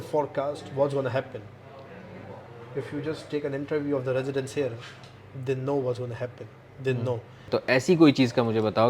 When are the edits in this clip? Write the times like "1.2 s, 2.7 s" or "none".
7.4 s